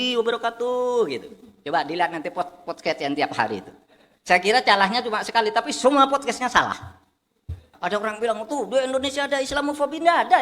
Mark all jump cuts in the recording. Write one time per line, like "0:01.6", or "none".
0:07.7